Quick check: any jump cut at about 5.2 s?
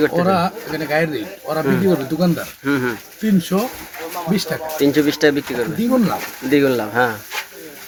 no; 0 cuts

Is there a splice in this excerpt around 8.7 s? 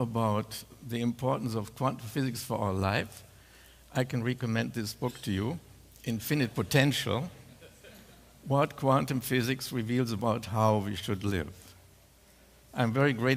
no; 1 cut; at 4.9 s

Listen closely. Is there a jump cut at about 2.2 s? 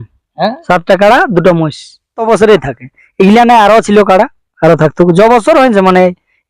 yes; 1 cut; at 2.2 s

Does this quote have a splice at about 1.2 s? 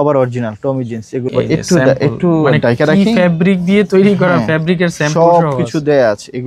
yes; 1 cut; at 1.2 s

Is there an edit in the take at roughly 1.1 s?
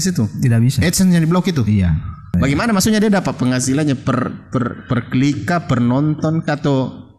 no; 1 cut; at 2.3 s

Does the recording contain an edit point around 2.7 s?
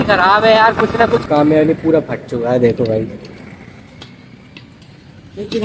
no; 1 cut; at 1.3 s

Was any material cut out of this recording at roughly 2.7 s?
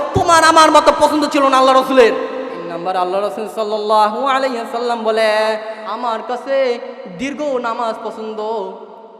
yes; 2 cuts; at 2.7 s, 5.8 s

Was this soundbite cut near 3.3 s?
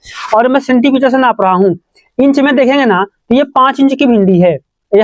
no; 0 cuts

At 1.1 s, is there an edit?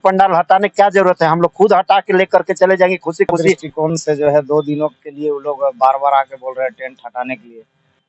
no; 1 cut; at 3.7 s

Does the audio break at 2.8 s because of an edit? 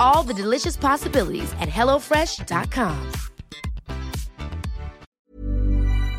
no; 1 cut; at 5.1 s

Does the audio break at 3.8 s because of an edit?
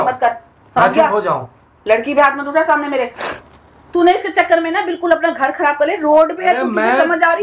yes; 1 cut; at 3.8 s

